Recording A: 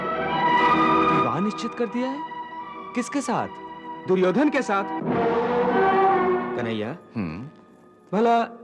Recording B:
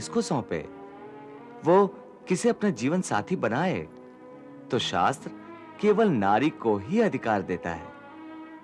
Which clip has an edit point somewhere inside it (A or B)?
A